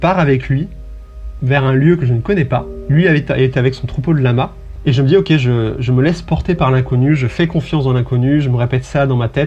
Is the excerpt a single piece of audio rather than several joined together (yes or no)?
no